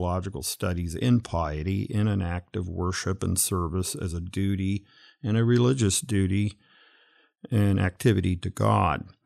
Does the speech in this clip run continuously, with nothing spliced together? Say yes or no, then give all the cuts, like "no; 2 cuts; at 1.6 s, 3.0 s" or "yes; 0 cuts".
yes; 0 cuts